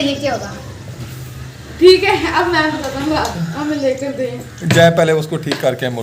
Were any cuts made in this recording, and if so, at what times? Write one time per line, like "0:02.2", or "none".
0:03.8